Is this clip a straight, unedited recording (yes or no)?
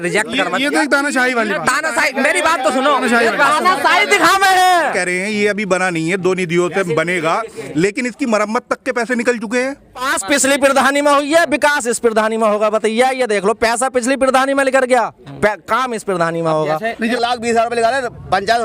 no